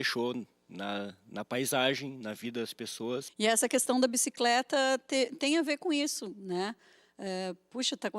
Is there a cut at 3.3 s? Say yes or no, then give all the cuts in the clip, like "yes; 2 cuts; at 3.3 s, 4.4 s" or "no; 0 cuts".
yes; 1 cut; at 3.3 s